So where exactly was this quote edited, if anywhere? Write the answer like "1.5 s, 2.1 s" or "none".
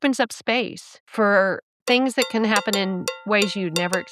1.1 s, 1.8 s, 3.1 s